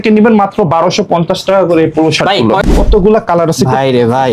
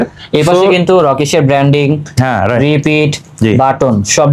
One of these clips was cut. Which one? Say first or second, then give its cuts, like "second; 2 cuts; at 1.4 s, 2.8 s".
first; 1 cut; at 2.6 s